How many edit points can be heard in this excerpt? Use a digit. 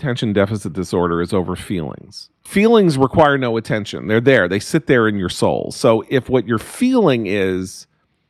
1